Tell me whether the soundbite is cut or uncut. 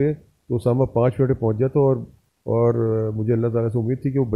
uncut